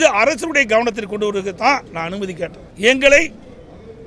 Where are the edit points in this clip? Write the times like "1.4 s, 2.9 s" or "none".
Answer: 2.6 s